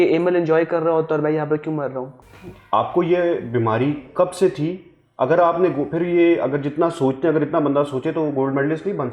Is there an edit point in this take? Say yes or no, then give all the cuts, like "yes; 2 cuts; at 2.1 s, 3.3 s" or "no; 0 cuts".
yes; 1 cut; at 2.2 s